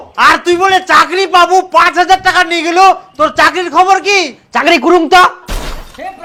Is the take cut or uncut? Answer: uncut